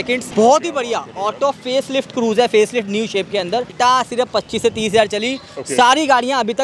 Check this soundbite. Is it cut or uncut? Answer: cut